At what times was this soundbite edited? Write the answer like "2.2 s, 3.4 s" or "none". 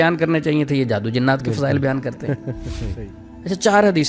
3.0 s

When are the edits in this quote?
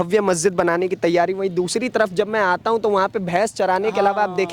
none

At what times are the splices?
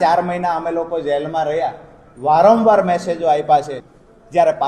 3.8 s

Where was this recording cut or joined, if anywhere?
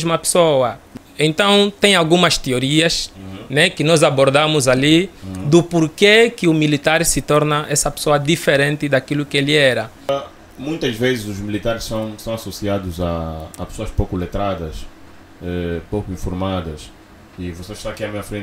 0.9 s, 10.1 s

